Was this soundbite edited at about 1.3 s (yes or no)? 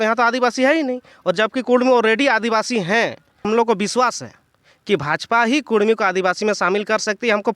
no